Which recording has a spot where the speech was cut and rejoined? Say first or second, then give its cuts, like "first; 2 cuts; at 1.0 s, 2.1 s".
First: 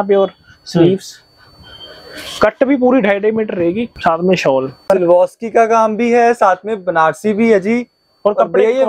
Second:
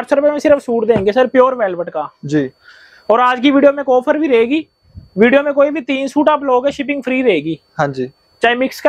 first; 2 cuts; at 3.9 s, 4.9 s